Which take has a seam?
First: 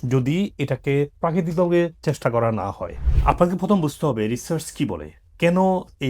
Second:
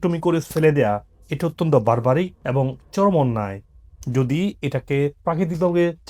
first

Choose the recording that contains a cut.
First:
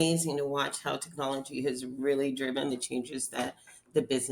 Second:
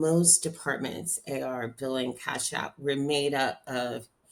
first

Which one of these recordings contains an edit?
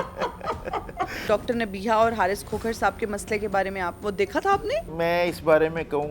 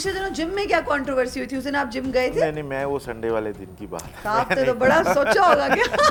first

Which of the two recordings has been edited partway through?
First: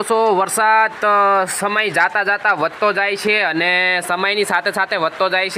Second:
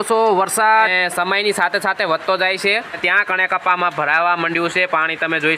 second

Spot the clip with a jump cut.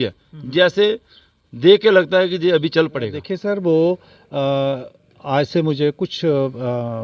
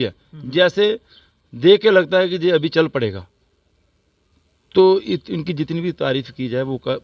first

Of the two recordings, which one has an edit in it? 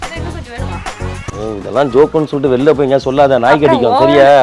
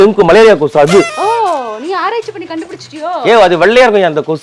second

